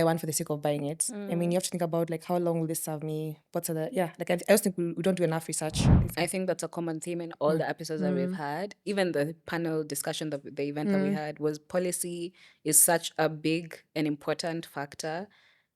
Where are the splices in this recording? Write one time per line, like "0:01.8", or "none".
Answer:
0:05.9